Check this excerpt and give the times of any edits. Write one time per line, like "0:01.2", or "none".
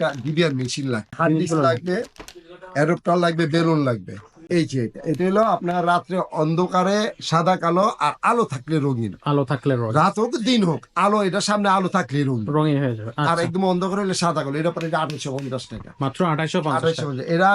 0:01.1
0:04.4